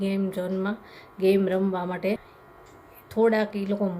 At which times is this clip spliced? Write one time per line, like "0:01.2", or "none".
0:02.4